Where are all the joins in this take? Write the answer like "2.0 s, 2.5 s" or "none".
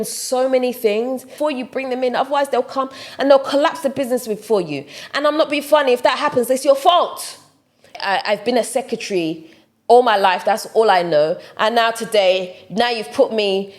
1.3 s, 7.9 s